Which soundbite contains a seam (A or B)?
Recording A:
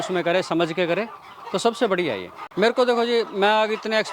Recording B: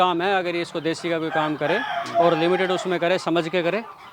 A